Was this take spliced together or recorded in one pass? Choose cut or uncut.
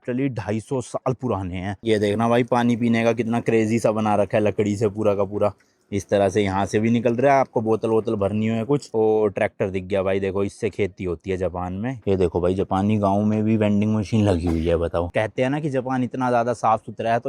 cut